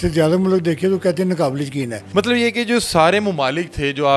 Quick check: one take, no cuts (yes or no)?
no